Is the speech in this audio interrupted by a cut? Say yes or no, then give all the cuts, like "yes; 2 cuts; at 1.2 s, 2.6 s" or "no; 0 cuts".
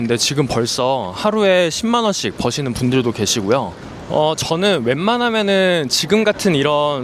yes; 1 cut; at 3.8 s